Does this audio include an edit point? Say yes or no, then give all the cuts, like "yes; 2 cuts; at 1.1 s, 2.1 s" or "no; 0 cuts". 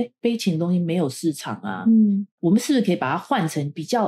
no; 0 cuts